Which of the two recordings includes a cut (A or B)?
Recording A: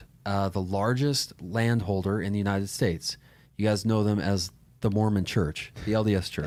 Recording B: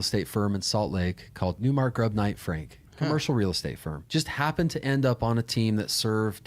B